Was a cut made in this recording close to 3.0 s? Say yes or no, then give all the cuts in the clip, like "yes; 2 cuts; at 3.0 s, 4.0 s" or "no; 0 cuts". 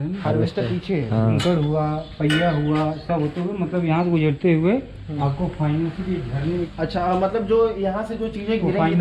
no; 2 cuts; at 1.4 s, 6.7 s